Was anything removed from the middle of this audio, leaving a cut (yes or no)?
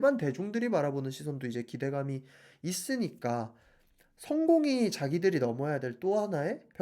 no